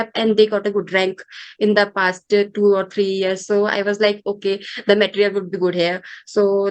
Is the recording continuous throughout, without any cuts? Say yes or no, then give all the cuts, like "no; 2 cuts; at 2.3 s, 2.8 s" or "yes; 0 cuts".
yes; 0 cuts